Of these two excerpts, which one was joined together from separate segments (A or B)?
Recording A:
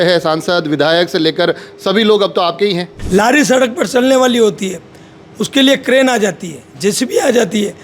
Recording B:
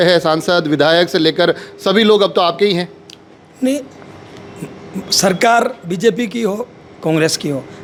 A